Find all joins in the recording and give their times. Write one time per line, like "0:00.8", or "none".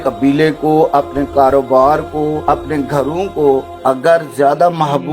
0:02.4
0:03.7